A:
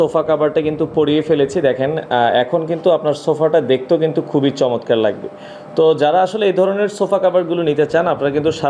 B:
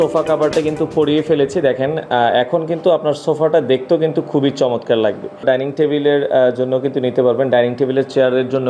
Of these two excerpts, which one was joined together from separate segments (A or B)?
B